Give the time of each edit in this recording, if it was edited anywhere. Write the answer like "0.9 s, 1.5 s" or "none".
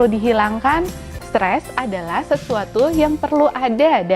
1.1 s